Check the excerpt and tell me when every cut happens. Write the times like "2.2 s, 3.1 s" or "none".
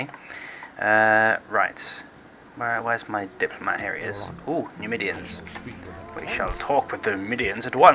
none